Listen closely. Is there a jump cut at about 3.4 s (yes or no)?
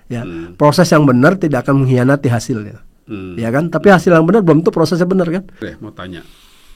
no